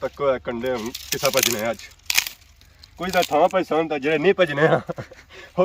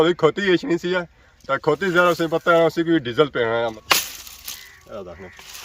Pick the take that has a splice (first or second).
second